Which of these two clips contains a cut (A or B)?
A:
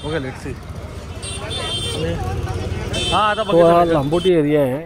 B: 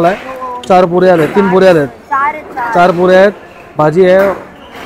A